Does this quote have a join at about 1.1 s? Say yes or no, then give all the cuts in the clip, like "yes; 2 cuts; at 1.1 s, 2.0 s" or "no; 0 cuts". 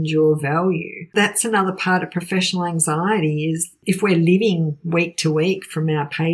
yes; 2 cuts; at 1.1 s, 3.7 s